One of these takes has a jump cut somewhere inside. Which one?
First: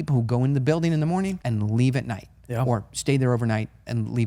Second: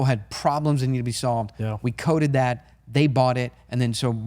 first; 1 cut; at 1.4 s

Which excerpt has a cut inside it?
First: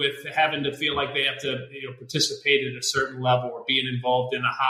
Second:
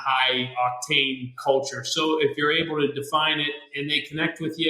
second; 2 cuts; at 1.4 s, 3.7 s

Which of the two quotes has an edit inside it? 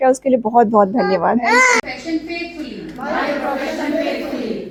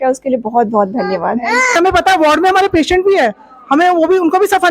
second; 1 cut; at 1.8 s

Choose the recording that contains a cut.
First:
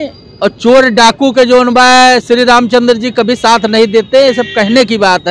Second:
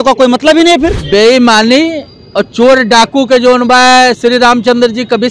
second; 1 cut; at 1.0 s

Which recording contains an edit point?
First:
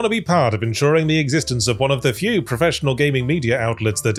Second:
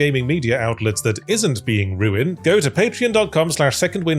second; 1 cut; at 2.3 s

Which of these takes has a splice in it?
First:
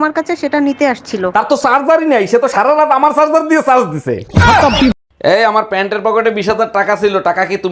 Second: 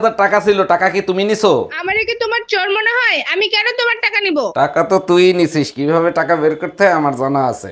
first; 1 cut; at 4.9 s

